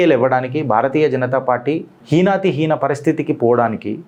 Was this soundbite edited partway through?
no; 0 cuts

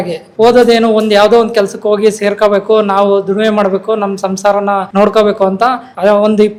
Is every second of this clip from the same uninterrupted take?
yes; 0 cuts

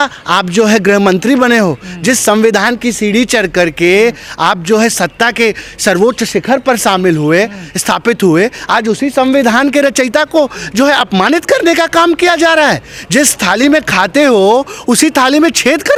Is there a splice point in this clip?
no; 0 cuts

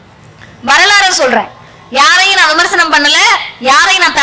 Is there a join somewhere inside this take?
no; 0 cuts

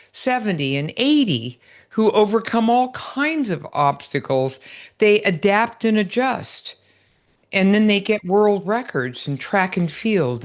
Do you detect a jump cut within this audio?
no; 0 cuts

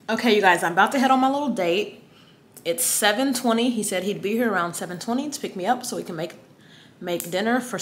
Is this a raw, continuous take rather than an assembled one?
yes; 0 cuts

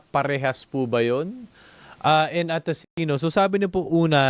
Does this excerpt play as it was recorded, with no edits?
no; 1 cut; at 3.0 s

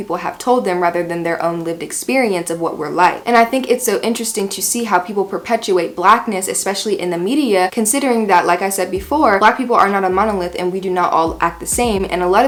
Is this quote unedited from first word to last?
yes; 0 cuts

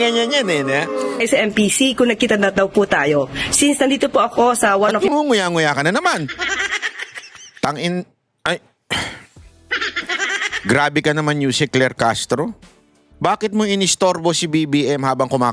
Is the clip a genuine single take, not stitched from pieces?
no; 1 cut; at 1.2 s

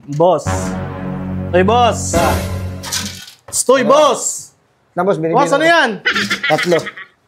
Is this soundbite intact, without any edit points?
yes; 0 cuts

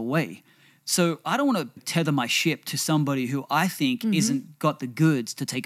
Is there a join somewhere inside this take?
yes; 1 cut; at 1.8 s

